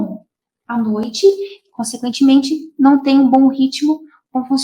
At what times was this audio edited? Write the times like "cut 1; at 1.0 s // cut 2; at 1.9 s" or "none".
none